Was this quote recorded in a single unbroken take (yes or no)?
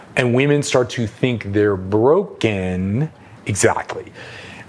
yes